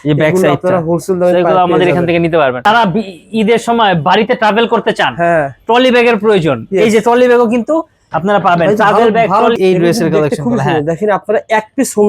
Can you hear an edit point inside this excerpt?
yes; 2 cuts; at 2.6 s, 9.6 s

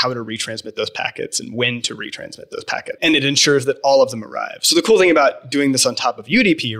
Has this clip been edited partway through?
yes; 1 cut; at 2.9 s

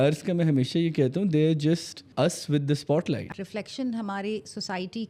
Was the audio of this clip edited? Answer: yes; 2 cuts; at 2.0 s, 3.3 s

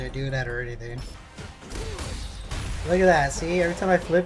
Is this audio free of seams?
no; 1 cut; at 1.2 s

